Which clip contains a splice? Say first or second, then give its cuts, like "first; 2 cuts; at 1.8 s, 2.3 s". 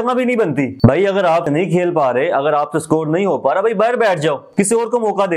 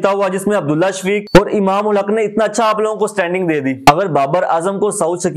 second; 1 cut; at 3.8 s